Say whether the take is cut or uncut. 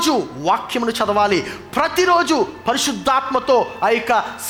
uncut